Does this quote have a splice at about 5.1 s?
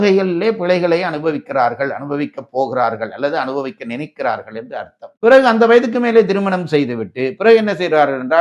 yes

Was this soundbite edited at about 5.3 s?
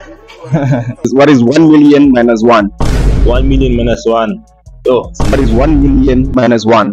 yes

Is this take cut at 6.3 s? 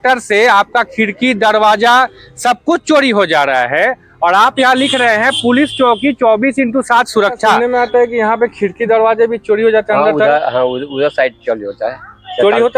no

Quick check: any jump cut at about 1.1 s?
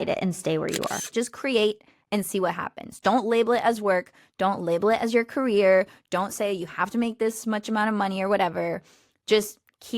yes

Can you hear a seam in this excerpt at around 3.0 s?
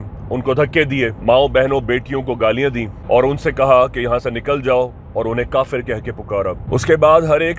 yes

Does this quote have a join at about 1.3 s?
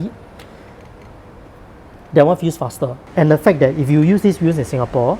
no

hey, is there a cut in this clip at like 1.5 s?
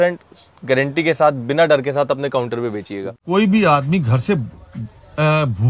no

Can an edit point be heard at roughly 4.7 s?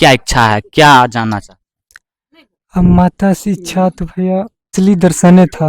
yes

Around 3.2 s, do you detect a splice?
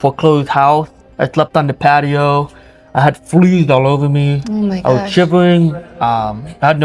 no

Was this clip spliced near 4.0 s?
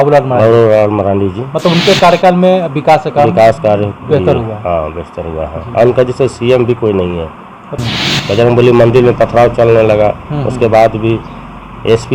no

